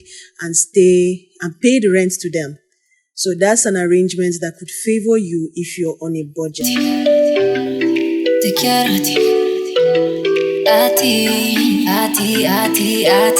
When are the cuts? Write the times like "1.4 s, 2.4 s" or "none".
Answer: 6.6 s